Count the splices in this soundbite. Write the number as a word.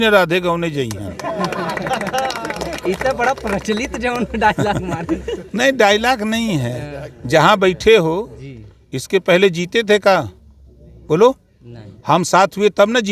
zero